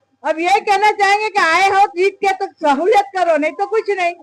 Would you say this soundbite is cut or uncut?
uncut